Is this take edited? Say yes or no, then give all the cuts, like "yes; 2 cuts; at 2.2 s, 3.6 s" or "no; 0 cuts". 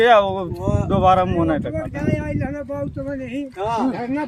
no; 0 cuts